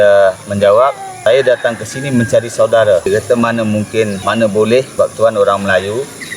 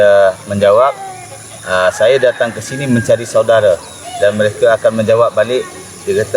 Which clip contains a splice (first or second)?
first